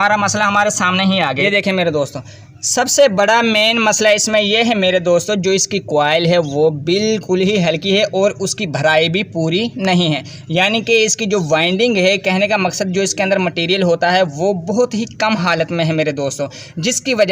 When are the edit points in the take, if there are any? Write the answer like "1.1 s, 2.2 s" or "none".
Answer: 1.4 s